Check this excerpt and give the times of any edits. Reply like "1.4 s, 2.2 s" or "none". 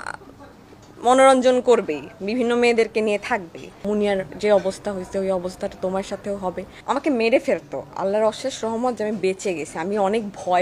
3.7 s, 6.7 s